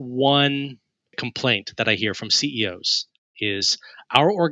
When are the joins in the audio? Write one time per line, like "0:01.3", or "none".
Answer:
0:01.2
0:03.4